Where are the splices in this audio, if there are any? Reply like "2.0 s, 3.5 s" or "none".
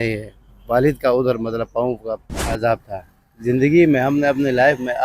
2.6 s